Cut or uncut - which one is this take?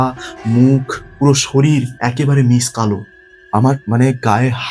cut